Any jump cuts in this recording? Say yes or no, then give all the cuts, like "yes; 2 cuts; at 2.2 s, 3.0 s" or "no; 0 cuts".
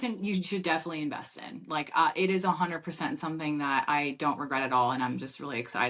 no; 0 cuts